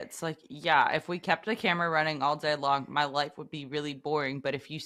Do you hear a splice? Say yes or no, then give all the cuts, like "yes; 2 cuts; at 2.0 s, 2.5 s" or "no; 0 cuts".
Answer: no; 0 cuts